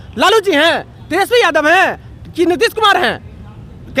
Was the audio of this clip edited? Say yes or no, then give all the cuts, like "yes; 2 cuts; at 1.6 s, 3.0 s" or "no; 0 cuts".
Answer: no; 0 cuts